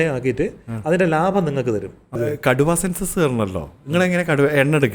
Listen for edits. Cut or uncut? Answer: cut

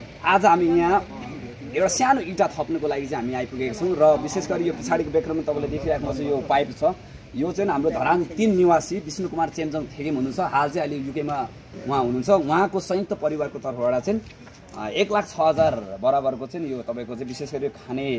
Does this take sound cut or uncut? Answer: uncut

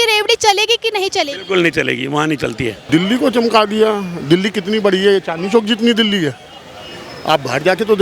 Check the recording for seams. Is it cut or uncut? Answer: cut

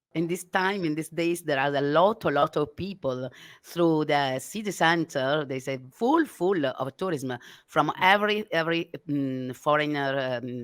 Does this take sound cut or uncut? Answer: uncut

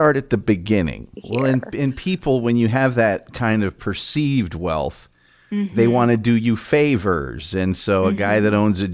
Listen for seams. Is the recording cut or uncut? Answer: cut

